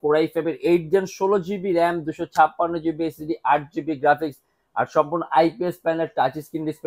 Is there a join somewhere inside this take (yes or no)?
no